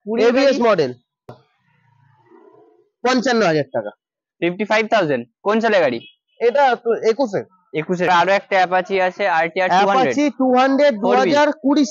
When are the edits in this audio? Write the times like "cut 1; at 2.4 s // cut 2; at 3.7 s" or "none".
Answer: cut 1; at 1.3 s // cut 2; at 8.1 s